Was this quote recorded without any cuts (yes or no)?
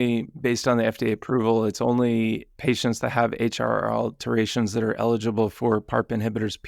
yes